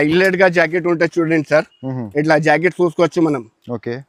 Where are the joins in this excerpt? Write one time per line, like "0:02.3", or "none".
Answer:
none

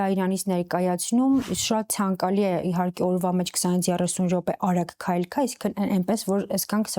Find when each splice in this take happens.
0:01.4

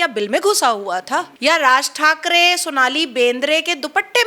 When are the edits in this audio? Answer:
0:01.3

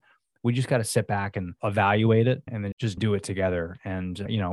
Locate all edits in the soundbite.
0:01.5
0:02.6

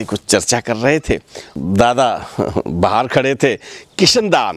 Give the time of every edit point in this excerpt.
0:01.6

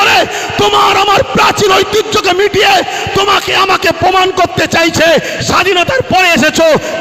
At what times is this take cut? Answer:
none

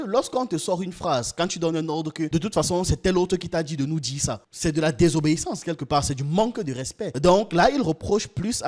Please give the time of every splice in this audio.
none

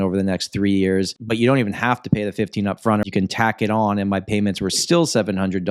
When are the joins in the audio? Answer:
0:01.2
0:03.0

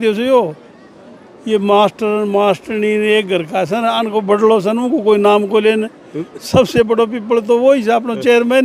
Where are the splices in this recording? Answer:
none

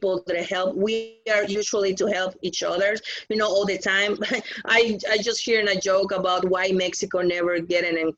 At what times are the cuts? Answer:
none

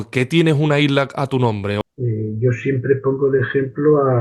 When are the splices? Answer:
0:01.8

